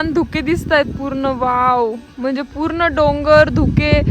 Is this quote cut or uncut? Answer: uncut